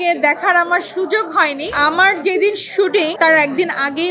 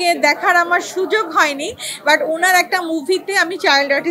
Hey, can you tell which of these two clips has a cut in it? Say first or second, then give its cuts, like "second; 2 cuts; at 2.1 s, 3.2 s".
first; 2 cuts; at 1.8 s, 3.2 s